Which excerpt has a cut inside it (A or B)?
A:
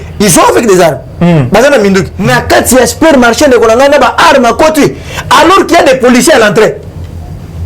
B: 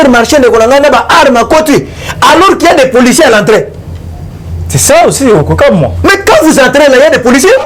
A